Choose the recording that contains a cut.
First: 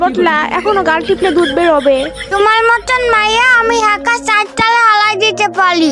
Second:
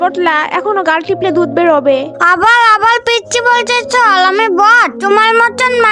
second; 2 cuts; at 2.2 s, 4.9 s

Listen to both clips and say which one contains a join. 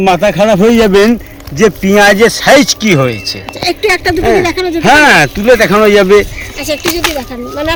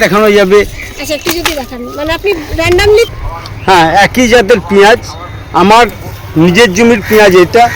second; 1 cut; at 3.1 s

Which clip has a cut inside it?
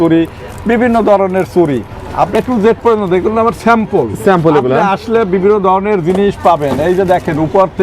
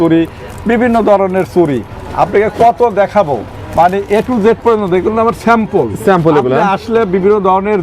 first; 1 cut; at 2.3 s

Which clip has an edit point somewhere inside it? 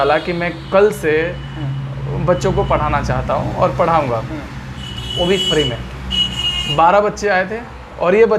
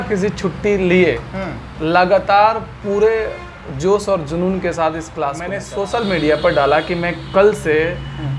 second; 1 cut; at 5.6 s

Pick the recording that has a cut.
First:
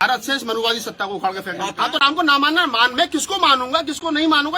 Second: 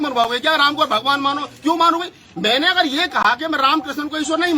first; 1 cut; at 1.7 s

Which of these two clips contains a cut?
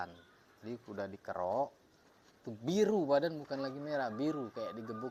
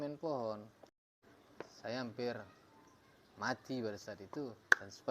second; 2 cuts; at 1.1 s, 4.2 s

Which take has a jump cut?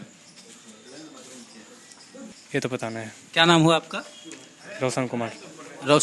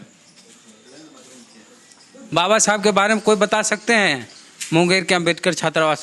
second; 1 cut; at 2.1 s

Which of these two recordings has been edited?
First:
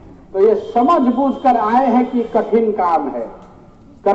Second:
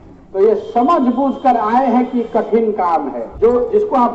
second; 1 cut; at 3.2 s

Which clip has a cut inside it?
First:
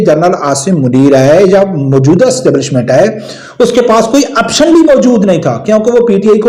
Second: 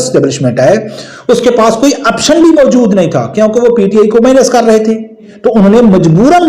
second; 1 cut; at 5.3 s

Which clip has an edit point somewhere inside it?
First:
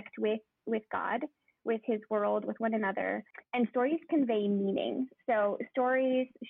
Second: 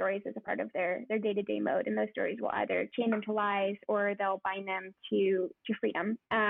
first; 1 cut; at 3.3 s

